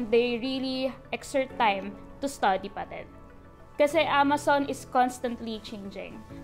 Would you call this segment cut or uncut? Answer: uncut